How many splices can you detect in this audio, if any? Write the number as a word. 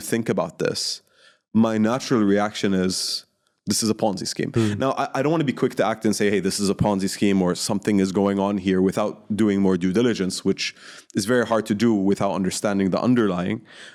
zero